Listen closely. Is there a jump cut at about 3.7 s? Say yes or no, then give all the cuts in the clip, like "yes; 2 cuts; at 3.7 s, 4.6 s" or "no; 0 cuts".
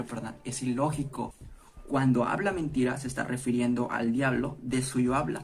no; 1 cut; at 1.5 s